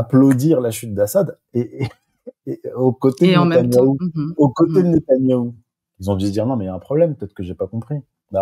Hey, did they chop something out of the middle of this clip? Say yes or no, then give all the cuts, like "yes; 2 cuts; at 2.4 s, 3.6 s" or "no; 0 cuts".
no; 0 cuts